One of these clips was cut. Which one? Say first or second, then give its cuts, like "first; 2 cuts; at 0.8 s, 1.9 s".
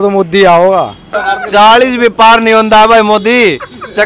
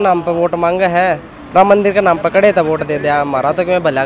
first; 1 cut; at 1.1 s